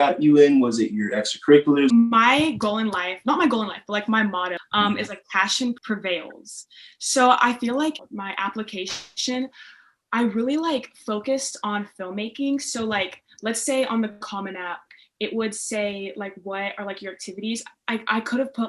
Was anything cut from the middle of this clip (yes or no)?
yes